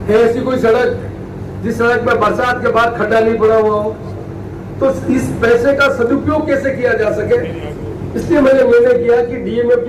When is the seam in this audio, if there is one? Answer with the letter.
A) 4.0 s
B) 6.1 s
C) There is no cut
C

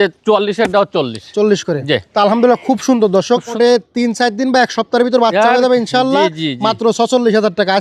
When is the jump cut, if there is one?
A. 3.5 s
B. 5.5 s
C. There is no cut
A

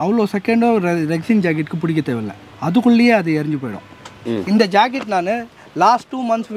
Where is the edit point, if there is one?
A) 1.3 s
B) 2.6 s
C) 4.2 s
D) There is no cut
C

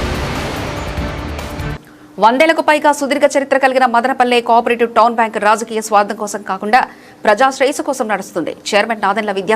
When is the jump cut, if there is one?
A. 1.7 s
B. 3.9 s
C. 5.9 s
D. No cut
A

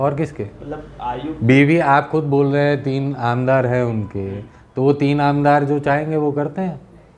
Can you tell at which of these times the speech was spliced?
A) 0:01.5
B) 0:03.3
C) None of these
C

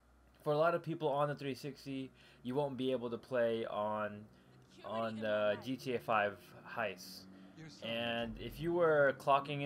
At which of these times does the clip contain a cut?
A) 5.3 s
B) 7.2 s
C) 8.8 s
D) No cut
C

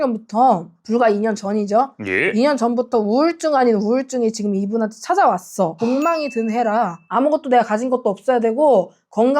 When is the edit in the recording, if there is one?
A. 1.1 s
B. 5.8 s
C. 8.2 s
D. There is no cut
B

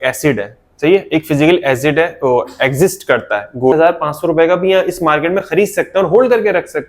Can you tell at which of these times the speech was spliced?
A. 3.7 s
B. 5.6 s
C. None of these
A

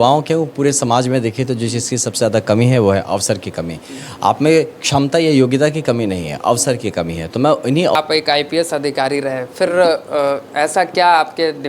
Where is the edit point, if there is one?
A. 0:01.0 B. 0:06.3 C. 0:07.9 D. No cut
C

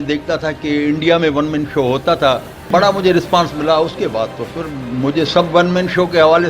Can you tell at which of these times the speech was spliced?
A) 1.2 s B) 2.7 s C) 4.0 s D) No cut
B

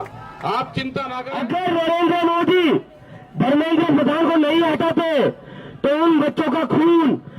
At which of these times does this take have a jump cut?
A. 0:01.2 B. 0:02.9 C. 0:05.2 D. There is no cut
A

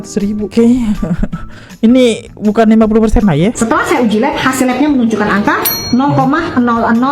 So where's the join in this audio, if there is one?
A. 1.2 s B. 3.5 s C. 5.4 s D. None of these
B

